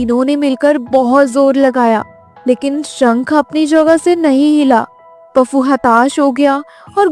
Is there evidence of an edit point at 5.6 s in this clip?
no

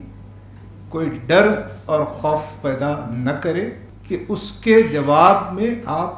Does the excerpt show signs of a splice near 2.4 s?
no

